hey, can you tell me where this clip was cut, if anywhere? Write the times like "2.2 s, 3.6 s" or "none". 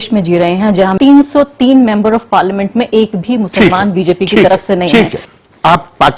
0.9 s, 5.2 s